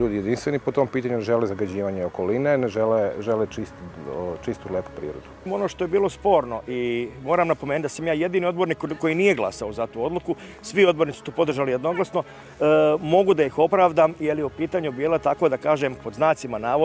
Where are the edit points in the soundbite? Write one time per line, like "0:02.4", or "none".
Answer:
0:05.5